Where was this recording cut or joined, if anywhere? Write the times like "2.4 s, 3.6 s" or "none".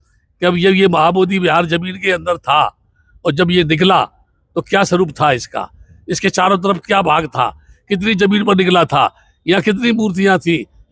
none

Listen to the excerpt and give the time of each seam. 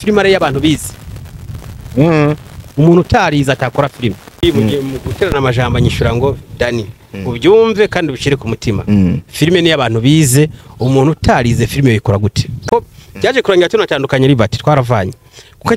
4.4 s, 12.5 s

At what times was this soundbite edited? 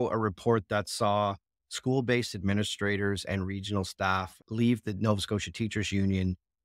none

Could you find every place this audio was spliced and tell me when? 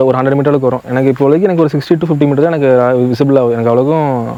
none

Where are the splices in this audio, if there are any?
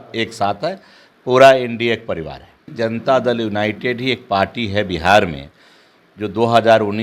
2.7 s

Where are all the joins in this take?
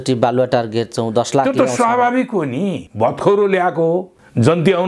2.8 s

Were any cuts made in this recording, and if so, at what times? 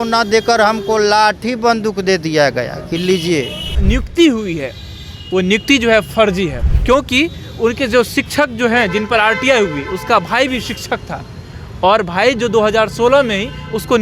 3.8 s, 6.7 s

